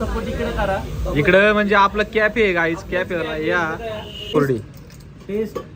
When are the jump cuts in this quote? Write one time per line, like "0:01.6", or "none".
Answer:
0:04.3